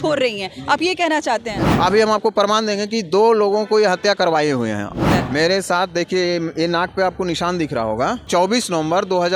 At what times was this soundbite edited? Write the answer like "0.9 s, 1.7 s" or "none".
1.6 s, 5.1 s, 8.3 s